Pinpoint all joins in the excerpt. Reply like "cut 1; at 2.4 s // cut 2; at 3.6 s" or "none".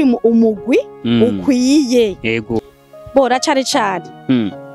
cut 1; at 2.6 s

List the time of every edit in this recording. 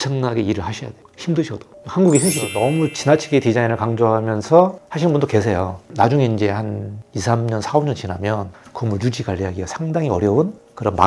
cut 1; at 2.5 s

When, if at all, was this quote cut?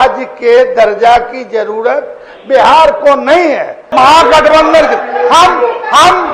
cut 1; at 3.8 s

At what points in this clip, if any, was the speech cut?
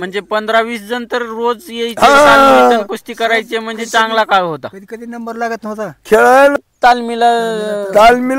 cut 1; at 6.5 s

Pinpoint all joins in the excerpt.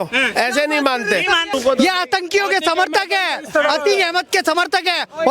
cut 1; at 1.5 s

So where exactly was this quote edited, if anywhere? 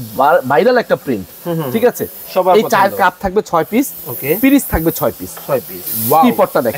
cut 1; at 5.8 s

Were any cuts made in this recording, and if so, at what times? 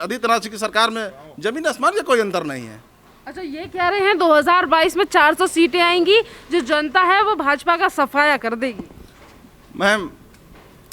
none

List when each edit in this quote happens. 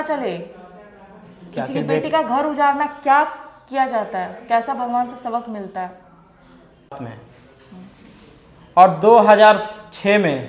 cut 1; at 6.9 s

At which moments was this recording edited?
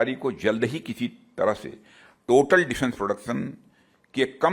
none

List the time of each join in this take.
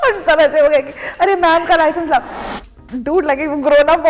cut 1; at 2.4 s

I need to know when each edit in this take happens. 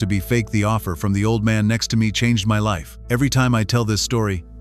cut 1; at 2.9 s

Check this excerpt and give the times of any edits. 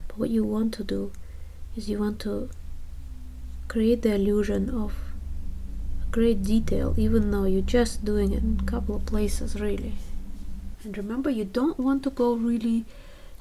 cut 1; at 10.7 s

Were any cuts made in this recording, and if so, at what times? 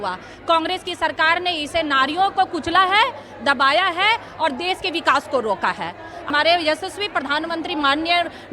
cut 1; at 6.2 s

